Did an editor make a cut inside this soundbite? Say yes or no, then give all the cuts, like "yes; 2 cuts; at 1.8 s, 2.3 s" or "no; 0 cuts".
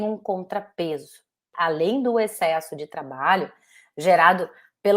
yes; 1 cut; at 1.5 s